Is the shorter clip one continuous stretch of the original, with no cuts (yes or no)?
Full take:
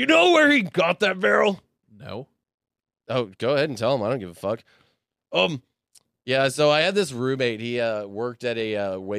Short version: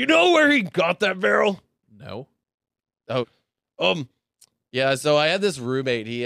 no